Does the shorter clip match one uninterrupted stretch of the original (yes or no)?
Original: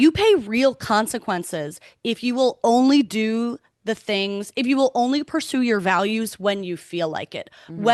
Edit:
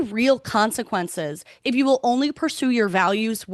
no